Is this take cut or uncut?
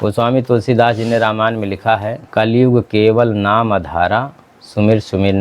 cut